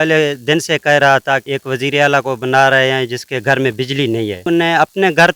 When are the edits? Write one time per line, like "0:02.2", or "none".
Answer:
0:01.5
0:04.4